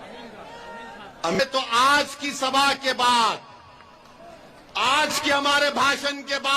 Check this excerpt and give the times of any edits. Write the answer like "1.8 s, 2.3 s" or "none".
1.4 s